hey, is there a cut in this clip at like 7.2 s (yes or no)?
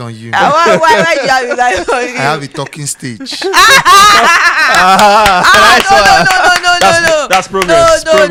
no